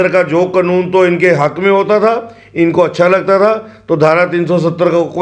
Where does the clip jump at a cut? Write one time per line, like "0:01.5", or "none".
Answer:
none